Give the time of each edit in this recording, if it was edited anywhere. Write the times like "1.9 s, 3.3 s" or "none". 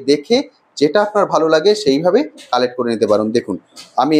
none